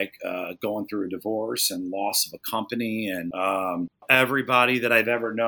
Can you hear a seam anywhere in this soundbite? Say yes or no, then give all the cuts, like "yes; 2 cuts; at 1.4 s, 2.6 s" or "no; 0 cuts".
yes; 2 cuts; at 3.3 s, 4.0 s